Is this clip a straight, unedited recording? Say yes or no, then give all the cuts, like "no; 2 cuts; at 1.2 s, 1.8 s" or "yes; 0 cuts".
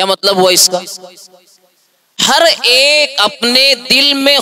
yes; 0 cuts